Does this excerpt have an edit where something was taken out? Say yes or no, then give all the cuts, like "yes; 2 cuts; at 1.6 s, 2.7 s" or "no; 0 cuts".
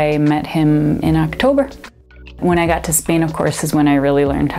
yes; 1 cut; at 2.2 s